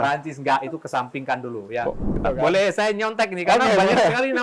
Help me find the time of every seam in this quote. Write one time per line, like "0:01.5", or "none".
0:02.2